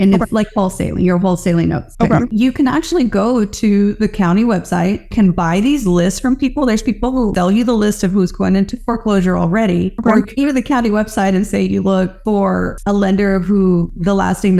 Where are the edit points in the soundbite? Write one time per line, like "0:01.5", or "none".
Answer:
0:02.3
0:05.1
0:07.3